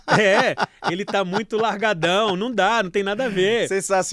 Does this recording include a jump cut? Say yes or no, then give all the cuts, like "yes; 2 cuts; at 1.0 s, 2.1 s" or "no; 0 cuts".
no; 0 cuts